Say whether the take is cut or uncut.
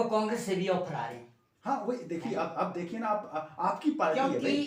uncut